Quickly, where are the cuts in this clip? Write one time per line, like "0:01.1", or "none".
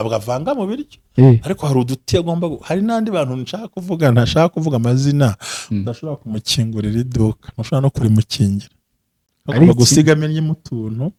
none